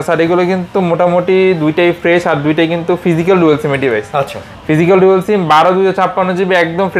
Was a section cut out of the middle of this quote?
no; 0 cuts

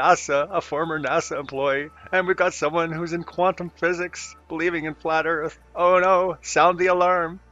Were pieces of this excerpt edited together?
yes; 1 cut; at 5.3 s

